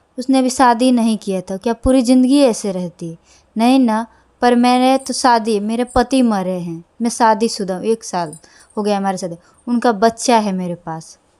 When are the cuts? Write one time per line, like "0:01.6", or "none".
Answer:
none